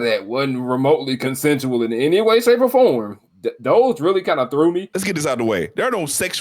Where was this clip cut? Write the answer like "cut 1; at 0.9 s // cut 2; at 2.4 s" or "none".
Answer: cut 1; at 4.9 s